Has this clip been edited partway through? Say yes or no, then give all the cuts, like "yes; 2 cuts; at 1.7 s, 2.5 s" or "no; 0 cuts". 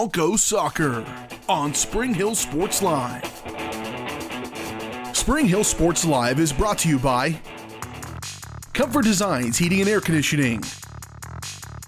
no; 0 cuts